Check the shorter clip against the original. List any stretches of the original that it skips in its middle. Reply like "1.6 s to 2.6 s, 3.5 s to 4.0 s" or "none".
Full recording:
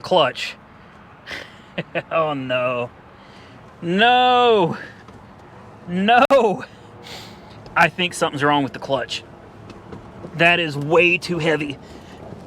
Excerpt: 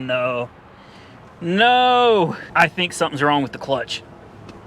4.8 s to 7.6 s